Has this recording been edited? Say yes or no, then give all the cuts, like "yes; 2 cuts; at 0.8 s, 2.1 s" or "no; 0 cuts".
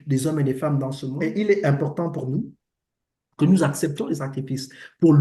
yes; 1 cut; at 1.1 s